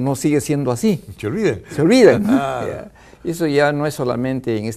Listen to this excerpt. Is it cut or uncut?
uncut